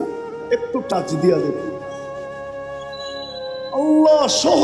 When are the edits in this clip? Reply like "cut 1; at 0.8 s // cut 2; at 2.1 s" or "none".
cut 1; at 2.0 s // cut 2; at 3.3 s